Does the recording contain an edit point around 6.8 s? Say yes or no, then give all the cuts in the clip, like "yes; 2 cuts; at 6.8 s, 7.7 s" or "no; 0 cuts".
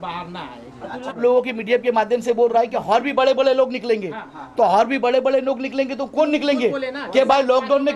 no; 1 cut; at 1.2 s